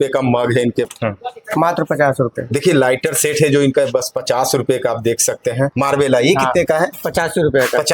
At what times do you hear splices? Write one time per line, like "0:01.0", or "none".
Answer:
0:00.9
0:05.7